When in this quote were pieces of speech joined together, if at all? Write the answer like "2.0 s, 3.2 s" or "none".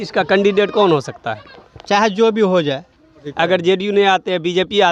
3.2 s